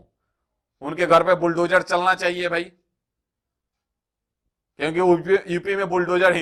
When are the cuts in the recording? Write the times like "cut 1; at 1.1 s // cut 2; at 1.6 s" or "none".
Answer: none

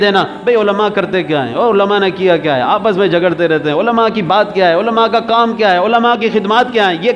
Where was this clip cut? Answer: none

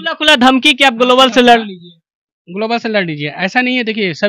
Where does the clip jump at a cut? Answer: none

